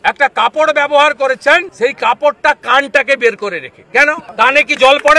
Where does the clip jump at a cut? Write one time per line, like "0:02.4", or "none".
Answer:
0:01.7
0:04.2

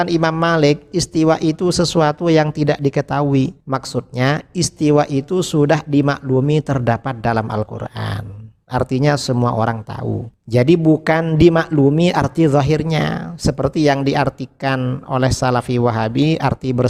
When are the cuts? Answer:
none

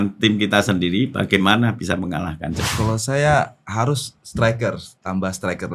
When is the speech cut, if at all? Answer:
0:02.6

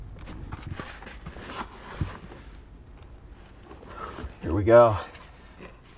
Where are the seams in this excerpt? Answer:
0:00.9

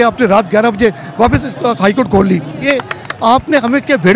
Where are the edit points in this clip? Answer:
0:02.7

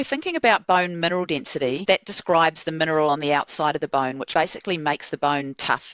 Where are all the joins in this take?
0:01.8
0:04.2

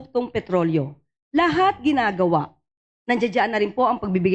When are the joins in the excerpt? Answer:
none

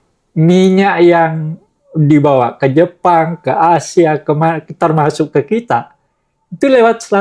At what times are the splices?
none

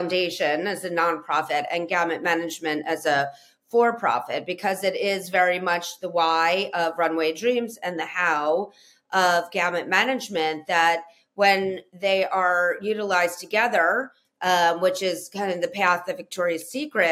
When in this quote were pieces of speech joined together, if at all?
none

